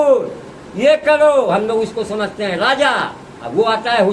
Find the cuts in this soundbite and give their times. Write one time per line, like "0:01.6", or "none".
none

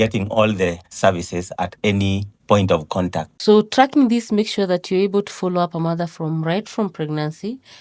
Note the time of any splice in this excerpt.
0:03.3

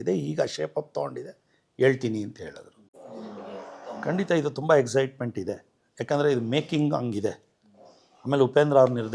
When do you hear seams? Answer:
0:02.9

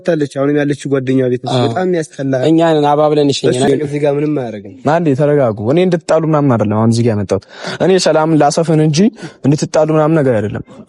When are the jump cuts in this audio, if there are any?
0:03.7

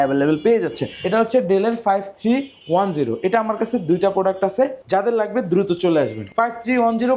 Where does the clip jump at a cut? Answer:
0:00.9
0:04.8
0:06.3

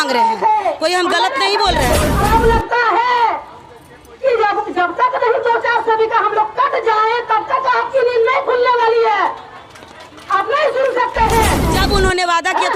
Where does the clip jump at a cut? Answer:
0:02.1
0:11.7

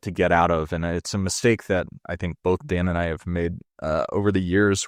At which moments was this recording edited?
none

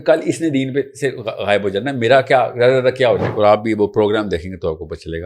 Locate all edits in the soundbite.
0:03.3

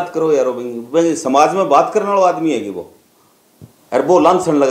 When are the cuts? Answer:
none

